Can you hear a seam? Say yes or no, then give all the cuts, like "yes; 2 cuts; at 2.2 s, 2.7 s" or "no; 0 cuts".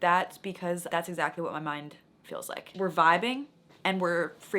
yes; 2 cuts; at 0.9 s, 2.6 s